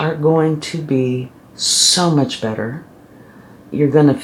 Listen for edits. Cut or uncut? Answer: uncut